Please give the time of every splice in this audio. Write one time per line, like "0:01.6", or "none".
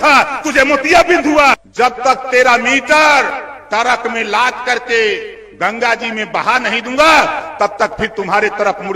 0:01.6